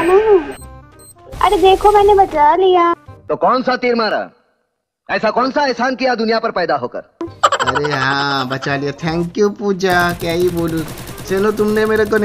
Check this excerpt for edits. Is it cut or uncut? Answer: uncut